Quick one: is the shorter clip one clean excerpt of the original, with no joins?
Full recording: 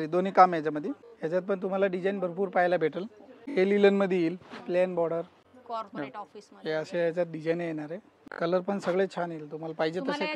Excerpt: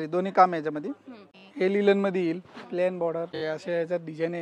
no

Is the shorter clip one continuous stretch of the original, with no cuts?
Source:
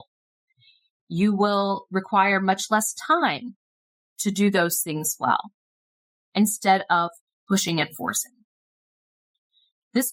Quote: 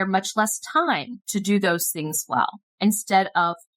no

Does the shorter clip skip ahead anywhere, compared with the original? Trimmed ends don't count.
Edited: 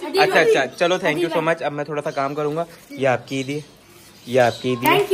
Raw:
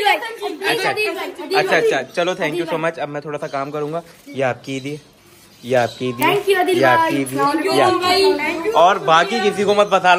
no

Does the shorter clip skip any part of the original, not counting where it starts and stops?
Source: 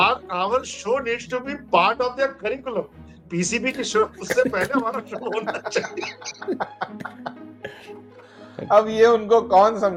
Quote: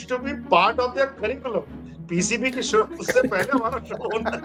no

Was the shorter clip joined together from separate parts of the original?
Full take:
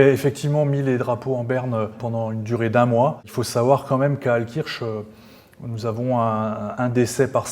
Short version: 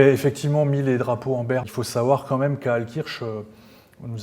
yes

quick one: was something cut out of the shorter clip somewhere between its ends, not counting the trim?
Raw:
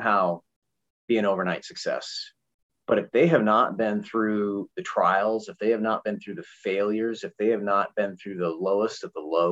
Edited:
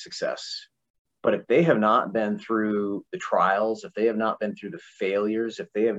no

